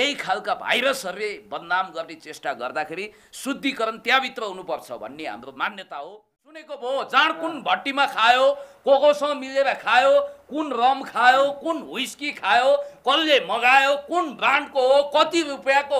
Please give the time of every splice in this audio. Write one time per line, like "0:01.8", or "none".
0:06.7